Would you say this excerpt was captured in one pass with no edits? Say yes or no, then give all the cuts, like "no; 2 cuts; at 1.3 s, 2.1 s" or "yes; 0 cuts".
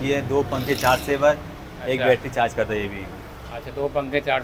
yes; 0 cuts